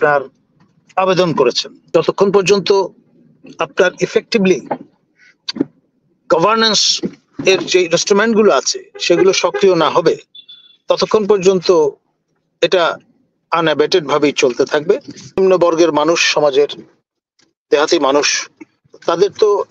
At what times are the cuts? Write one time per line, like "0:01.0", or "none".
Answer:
0:01.7
0:15.4

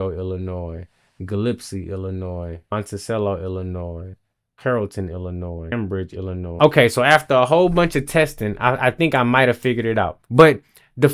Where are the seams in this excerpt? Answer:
0:04.2
0:06.5
0:10.2

